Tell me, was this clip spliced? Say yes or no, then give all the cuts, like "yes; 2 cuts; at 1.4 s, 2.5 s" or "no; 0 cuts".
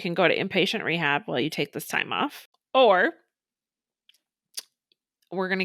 yes; 1 cut; at 2.5 s